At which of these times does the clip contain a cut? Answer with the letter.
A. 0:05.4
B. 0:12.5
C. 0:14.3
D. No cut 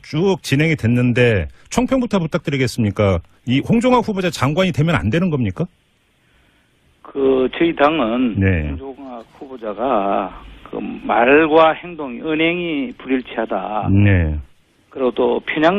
C